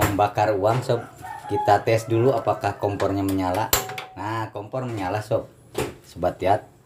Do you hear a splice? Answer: no; 0 cuts

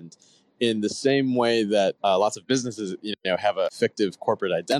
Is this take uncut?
no; 2 cuts; at 2.0 s, 3.7 s

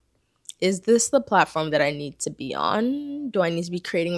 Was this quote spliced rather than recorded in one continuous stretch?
no; 0 cuts

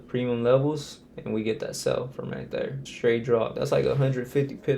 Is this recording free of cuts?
no; 2 cuts; at 2.8 s, 3.5 s

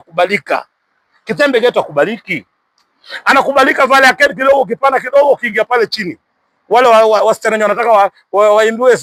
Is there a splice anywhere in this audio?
no; 0 cuts

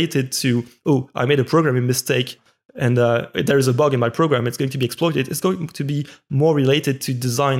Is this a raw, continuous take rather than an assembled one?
yes; 0 cuts

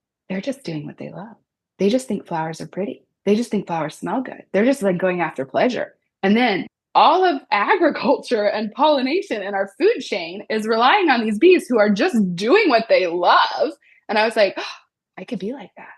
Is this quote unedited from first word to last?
no; 1 cut; at 6.7 s

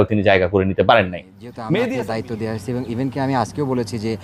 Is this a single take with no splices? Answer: no; 1 cut; at 1.9 s

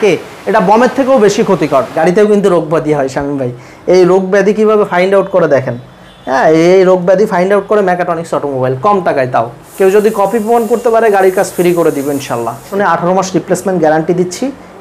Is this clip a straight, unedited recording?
no; 3 cuts; at 1.9 s, 9.6 s, 12.7 s

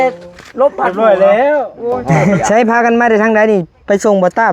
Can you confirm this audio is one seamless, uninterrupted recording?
no; 1 cut; at 2.4 s

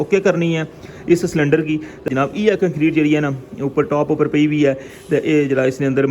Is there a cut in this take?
yes; 1 cut; at 2.1 s

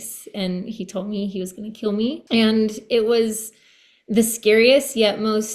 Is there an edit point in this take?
yes; 1 cut; at 2.2 s

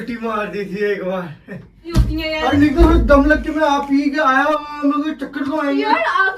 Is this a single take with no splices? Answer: no; 1 cut; at 1.9 s

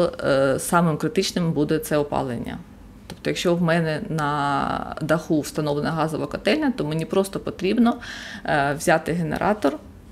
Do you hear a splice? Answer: no; 0 cuts

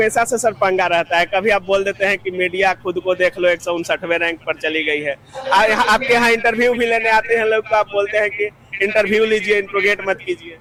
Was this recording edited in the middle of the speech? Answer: no; 0 cuts

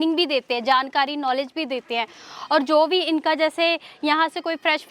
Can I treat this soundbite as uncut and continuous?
yes; 0 cuts

